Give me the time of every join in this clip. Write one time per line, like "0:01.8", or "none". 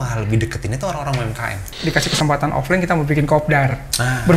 0:01.7